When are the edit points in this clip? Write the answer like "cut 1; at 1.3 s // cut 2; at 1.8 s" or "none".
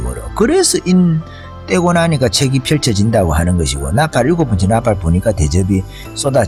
none

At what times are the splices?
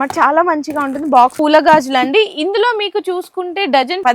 cut 1; at 1.3 s

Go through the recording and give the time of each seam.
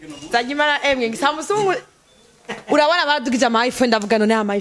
none

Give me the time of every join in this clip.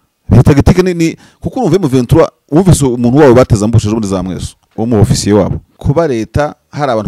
cut 1; at 5.7 s

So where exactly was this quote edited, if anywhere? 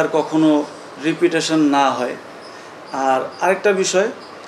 none

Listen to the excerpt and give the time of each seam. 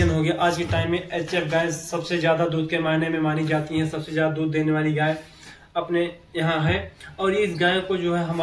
none

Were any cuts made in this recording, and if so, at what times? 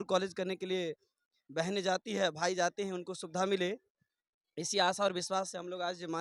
none

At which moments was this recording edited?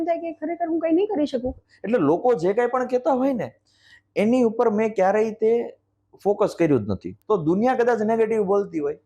cut 1; at 1.7 s // cut 2; at 7.1 s

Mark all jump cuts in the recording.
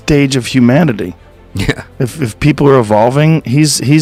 none

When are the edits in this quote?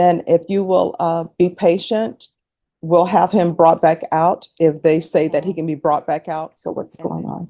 cut 1; at 6.5 s

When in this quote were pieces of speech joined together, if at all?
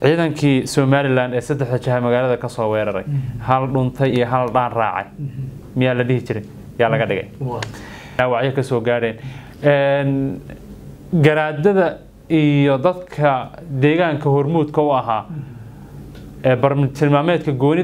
cut 1; at 8.2 s

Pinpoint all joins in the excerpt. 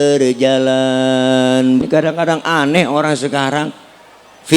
cut 1; at 1.8 s

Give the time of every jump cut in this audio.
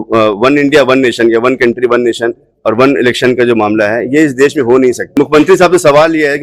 cut 1; at 5.0 s

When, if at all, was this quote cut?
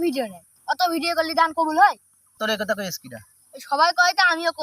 cut 1; at 2.3 s

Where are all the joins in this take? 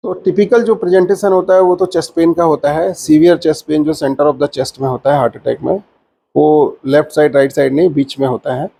none

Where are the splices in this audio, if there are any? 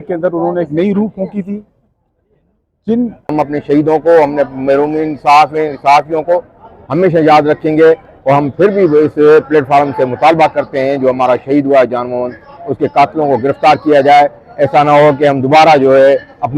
cut 1; at 3.3 s

